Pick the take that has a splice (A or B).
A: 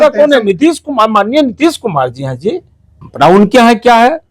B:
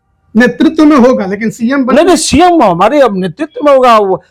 A